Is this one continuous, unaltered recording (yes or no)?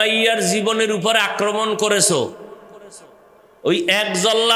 yes